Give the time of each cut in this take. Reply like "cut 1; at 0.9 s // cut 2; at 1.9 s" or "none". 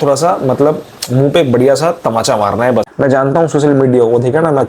cut 1; at 2.9 s